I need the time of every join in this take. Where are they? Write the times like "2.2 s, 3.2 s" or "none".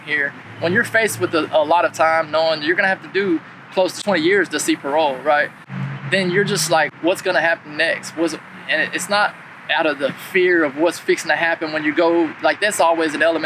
4.0 s, 5.6 s, 6.9 s